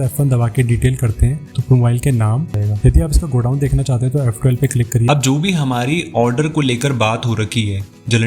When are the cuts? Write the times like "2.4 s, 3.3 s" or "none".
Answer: 2.5 s, 5.0 s